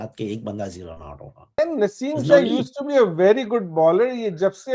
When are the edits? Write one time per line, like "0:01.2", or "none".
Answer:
0:01.6